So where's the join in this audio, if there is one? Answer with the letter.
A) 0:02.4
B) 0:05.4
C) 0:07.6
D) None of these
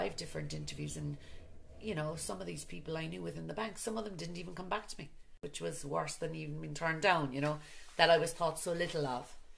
B